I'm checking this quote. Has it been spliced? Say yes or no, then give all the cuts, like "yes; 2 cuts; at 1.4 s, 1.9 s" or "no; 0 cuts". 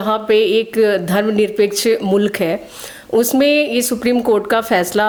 no; 0 cuts